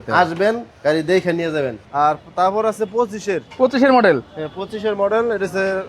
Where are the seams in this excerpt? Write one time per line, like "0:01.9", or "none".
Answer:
0:01.8

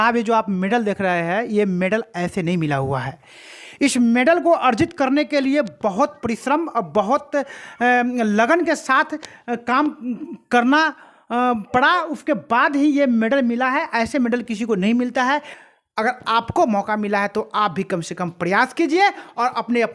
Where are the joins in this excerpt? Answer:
0:15.5

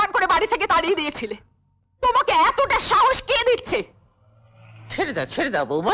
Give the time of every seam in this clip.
none

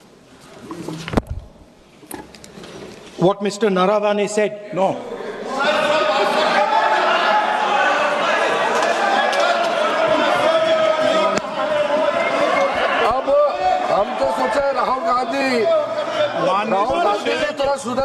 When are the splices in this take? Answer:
none

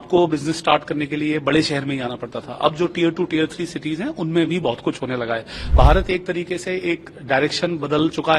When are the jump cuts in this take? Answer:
0:05.6

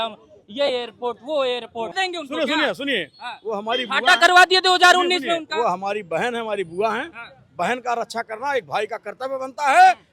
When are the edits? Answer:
0:02.0

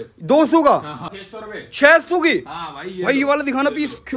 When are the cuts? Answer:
0:01.0

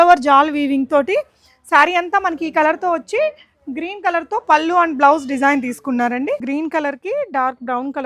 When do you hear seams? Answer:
0:06.4

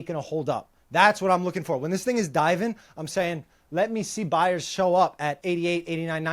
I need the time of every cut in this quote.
0:05.4

